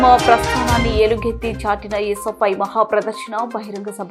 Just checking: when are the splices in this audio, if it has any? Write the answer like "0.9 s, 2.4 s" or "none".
none